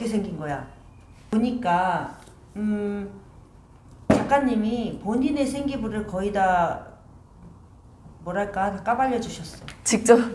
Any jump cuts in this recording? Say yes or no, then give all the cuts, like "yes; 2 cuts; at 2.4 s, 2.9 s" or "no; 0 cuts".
yes; 1 cut; at 1.3 s